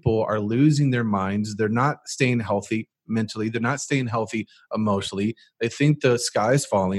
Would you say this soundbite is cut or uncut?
uncut